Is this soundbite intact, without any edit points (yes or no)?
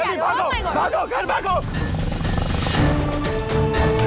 no